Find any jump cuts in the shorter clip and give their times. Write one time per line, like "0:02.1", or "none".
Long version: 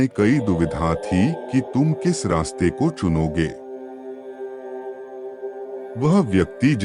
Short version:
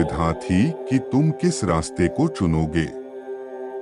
0:02.9